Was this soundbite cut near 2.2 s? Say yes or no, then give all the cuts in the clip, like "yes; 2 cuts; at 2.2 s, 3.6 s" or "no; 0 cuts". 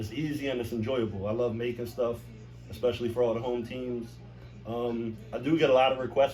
no; 0 cuts